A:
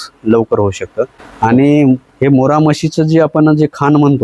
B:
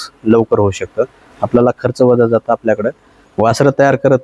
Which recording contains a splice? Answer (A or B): B